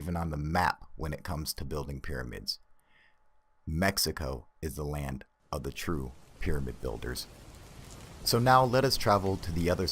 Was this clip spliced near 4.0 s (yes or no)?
yes